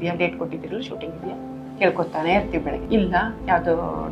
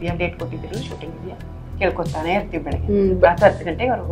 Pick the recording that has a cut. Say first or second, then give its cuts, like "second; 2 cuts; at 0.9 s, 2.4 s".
first; 1 cut; at 2.8 s